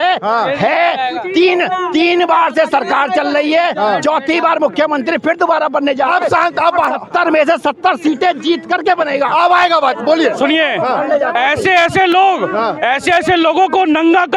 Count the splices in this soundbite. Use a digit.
0